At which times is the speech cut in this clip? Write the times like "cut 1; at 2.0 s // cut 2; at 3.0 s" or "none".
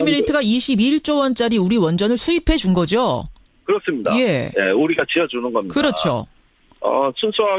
cut 1; at 4.0 s

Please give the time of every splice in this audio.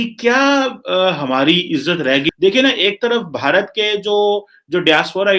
cut 1; at 2.3 s

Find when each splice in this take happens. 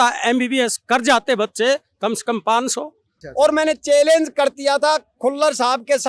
cut 1; at 3.1 s

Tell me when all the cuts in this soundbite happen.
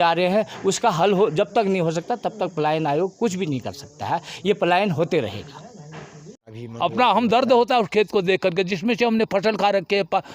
cut 1; at 6.5 s

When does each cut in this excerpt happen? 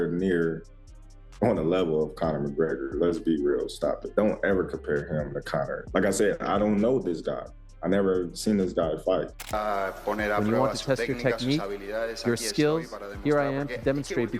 cut 1; at 4.0 s // cut 2; at 5.8 s // cut 3; at 9.5 s

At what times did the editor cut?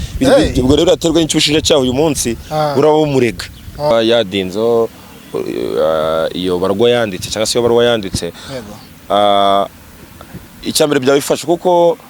cut 1; at 3.9 s

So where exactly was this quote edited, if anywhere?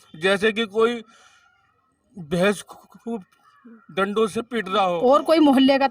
cut 1; at 4.9 s

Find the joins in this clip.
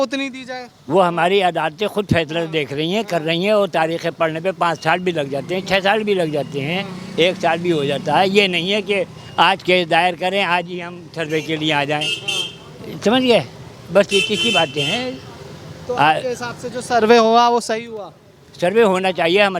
none

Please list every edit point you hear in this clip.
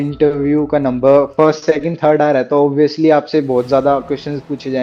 none

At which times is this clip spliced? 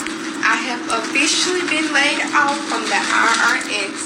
none

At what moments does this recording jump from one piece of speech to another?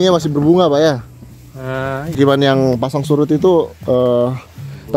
cut 1; at 2.1 s

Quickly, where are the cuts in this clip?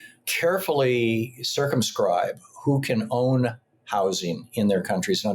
none

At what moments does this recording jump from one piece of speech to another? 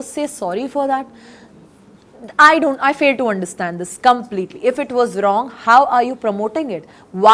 none

